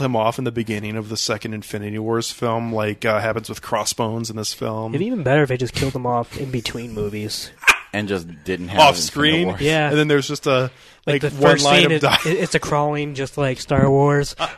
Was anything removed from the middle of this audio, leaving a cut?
no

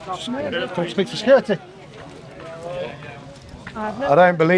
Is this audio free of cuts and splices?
yes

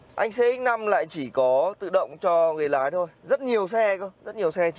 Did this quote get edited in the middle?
no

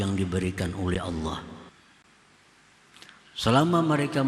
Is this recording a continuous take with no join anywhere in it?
no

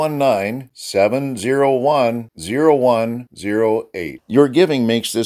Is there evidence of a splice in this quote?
no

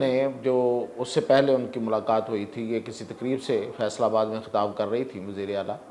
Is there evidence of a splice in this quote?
no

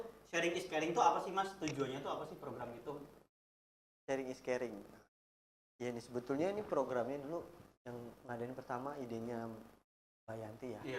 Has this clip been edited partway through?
no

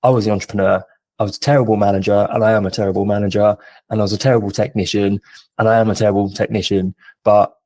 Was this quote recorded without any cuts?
yes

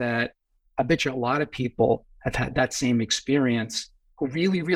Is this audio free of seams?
yes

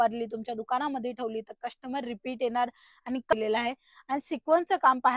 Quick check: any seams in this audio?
yes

